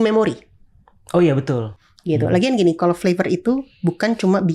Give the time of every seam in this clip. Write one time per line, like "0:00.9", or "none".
0:01.7